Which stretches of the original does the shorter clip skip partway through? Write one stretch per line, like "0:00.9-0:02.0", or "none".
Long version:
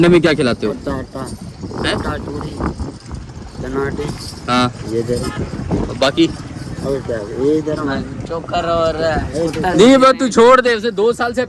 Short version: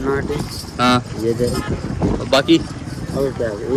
none

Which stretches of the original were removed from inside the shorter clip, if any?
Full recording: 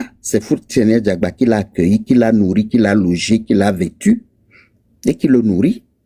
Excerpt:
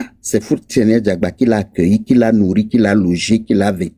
none

